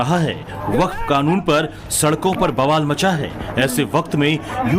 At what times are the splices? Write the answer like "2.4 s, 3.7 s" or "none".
1.0 s

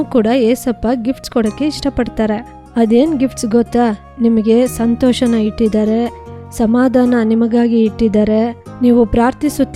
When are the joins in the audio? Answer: none

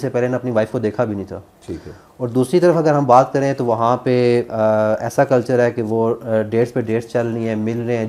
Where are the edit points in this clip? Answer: none

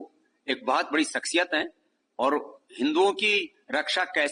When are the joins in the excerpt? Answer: none

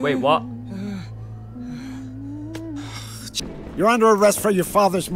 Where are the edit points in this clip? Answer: 3.3 s

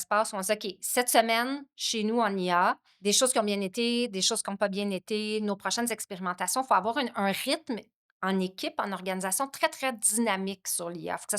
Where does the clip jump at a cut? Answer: 2.9 s

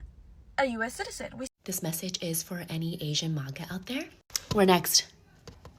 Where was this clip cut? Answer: 1.5 s

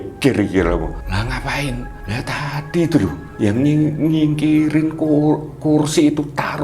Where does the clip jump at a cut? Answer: 1.0 s, 1.9 s, 3.2 s

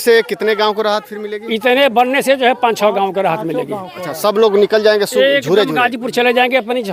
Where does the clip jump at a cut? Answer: none

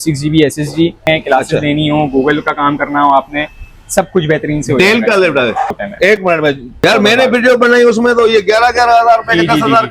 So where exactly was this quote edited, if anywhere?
1.0 s, 5.7 s, 6.8 s

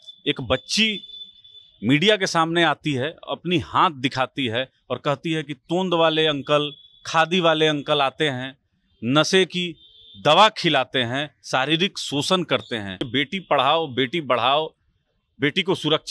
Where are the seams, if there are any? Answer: 13.0 s

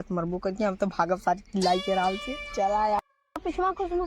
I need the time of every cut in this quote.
3.0 s

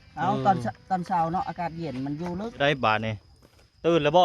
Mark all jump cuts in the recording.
2.6 s

